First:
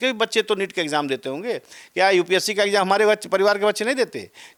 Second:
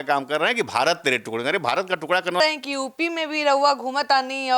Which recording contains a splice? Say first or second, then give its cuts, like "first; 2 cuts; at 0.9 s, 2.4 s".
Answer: second; 1 cut; at 2.4 s